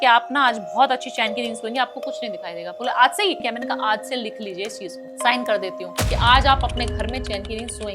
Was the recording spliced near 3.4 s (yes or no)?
yes